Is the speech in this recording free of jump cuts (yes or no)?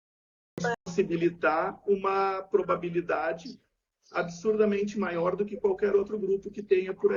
yes